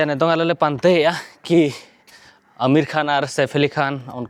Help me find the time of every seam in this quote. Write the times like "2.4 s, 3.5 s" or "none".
none